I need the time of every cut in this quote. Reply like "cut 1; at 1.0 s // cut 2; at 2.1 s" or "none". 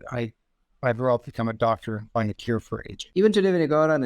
cut 1; at 3.0 s